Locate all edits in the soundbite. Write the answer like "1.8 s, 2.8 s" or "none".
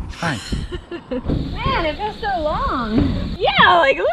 1.6 s, 3.3 s